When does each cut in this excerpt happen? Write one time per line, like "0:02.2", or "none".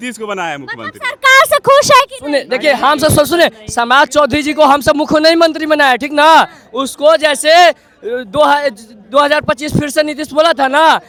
none